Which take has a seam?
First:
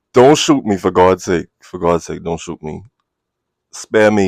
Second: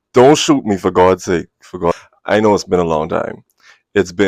second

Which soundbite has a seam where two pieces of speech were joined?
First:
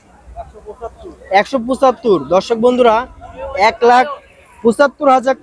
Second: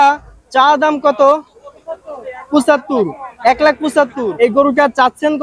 second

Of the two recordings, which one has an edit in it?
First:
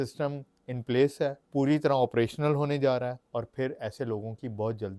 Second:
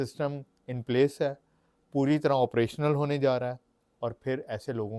first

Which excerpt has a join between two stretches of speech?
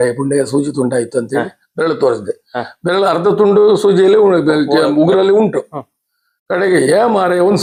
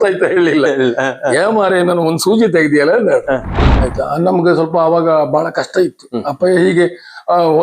second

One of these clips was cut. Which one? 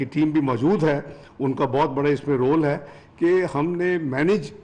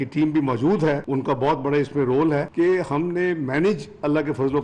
second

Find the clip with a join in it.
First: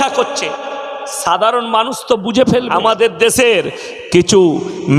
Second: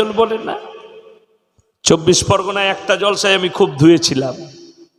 first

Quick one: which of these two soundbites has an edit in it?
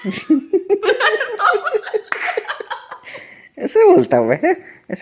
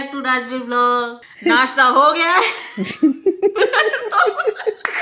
second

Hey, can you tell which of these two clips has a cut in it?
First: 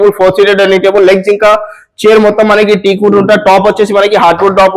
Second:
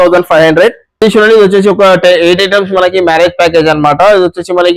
second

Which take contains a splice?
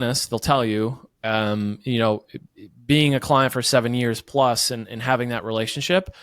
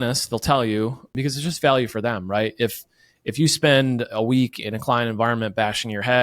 second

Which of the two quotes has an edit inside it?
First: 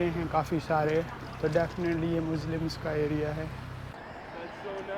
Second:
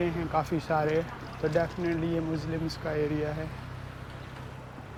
first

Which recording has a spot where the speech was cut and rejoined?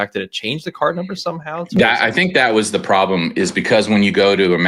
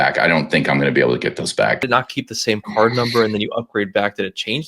second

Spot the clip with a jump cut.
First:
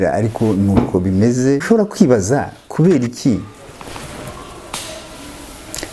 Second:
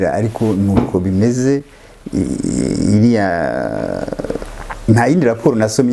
first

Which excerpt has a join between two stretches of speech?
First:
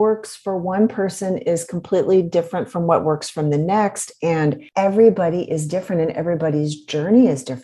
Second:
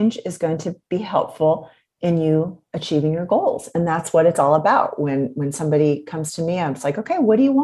first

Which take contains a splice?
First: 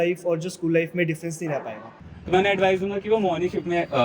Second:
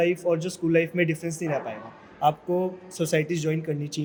first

